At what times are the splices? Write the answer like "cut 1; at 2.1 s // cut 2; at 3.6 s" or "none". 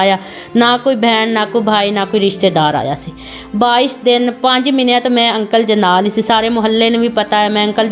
none